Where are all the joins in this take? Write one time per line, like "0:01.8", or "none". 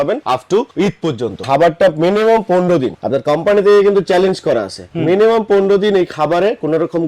0:01.4

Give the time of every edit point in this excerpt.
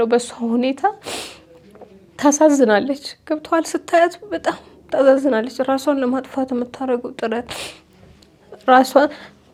none

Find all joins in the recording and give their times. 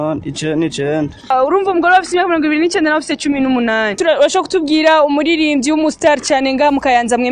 0:01.3
0:04.0

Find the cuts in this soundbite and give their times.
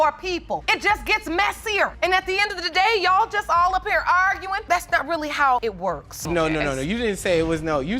0:06.3

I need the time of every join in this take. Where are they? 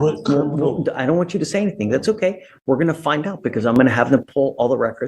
none

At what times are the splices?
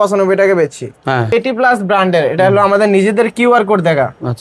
0:01.3

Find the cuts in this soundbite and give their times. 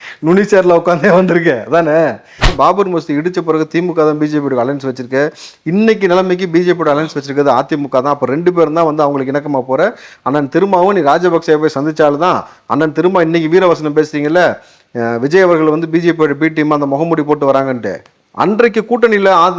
0:02.5

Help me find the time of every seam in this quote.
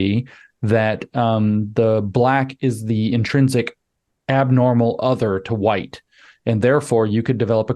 none

